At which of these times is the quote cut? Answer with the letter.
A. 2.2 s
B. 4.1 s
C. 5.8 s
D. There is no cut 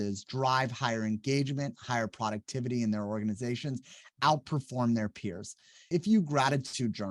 C